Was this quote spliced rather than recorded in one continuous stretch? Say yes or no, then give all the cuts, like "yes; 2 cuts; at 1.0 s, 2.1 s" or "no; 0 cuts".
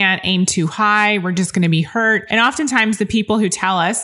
yes; 1 cut; at 2.2 s